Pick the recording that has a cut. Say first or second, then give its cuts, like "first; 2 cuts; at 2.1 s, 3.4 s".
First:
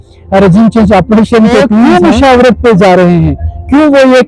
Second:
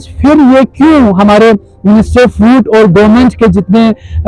first; 1 cut; at 1.9 s